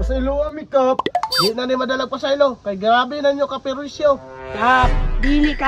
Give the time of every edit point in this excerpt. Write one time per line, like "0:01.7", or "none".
none

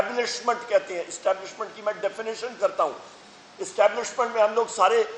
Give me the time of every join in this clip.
0:03.1

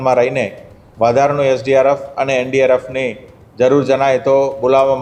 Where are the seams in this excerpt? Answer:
none

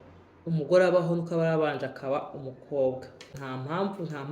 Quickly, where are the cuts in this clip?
0:03.3

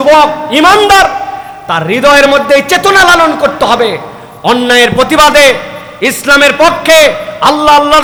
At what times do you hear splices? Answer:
none

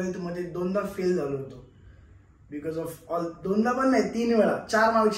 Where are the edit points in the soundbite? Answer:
none

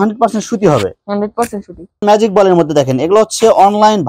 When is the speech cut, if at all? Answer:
0:02.0

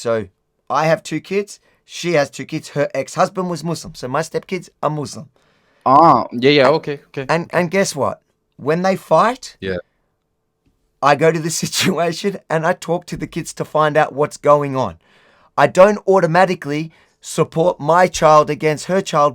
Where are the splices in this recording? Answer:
none

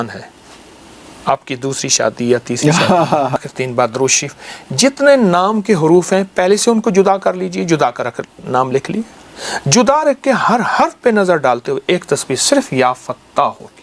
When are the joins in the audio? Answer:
0:03.4

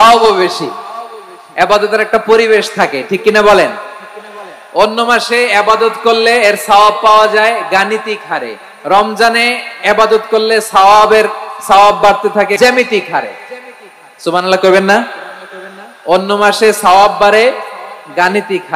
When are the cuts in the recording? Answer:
0:12.6

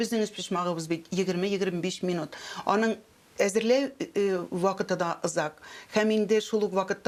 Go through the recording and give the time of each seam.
none

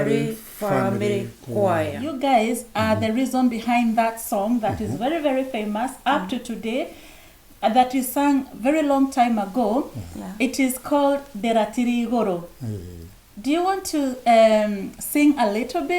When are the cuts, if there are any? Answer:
0:02.0

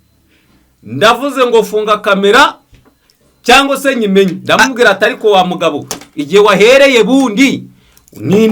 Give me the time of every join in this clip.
none

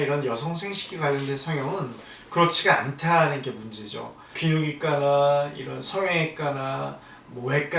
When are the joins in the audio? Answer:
0:04.3

